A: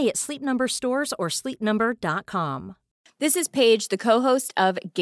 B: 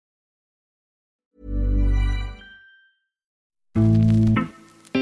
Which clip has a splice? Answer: B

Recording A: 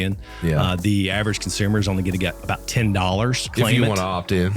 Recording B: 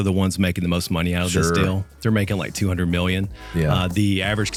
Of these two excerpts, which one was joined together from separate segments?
A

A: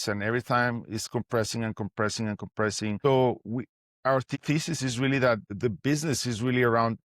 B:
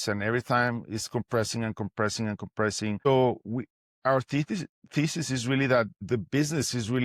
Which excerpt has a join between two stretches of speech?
A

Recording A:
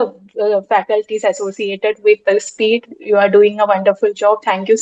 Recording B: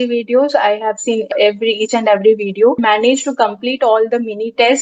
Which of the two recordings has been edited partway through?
B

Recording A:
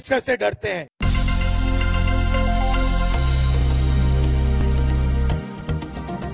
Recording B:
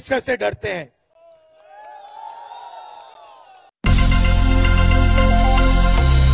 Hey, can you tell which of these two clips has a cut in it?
A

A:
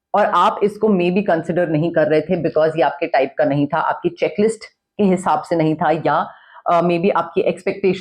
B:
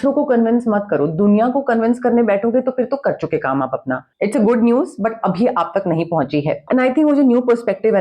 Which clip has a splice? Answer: B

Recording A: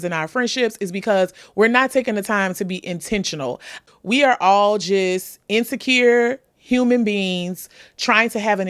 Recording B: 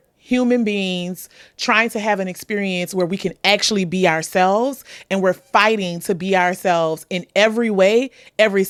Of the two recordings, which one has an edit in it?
A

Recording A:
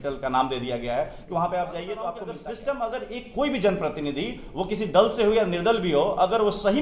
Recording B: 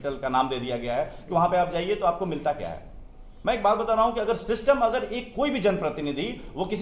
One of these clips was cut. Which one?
A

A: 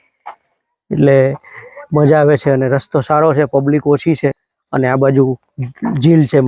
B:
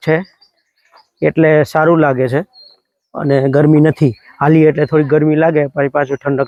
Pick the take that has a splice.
A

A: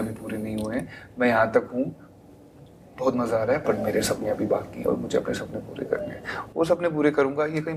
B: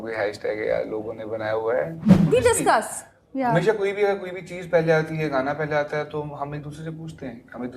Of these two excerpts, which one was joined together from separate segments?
B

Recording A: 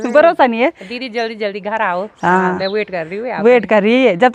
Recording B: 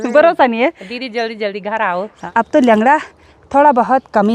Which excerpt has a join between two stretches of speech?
B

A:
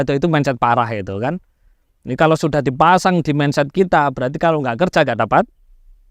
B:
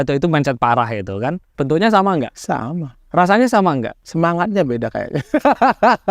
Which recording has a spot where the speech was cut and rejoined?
B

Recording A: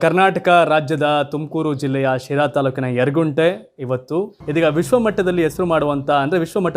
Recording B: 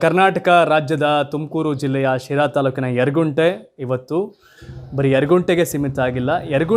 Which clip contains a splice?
A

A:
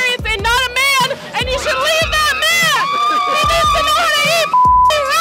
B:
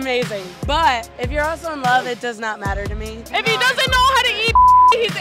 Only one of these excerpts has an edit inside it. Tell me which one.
B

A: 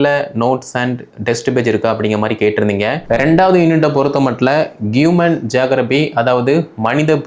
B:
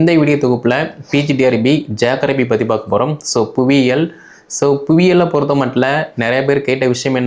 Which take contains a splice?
A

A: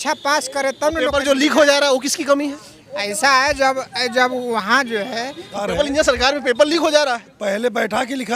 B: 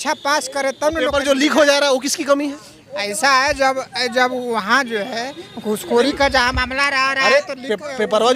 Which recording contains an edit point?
A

